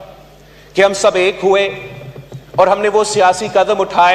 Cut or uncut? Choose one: uncut